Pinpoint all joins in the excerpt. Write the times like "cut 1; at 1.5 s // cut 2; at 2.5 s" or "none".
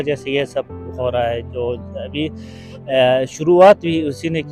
none